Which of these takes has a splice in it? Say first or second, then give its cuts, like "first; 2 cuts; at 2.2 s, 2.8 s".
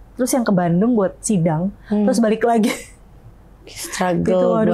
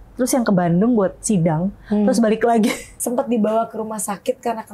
second; 1 cut; at 2.9 s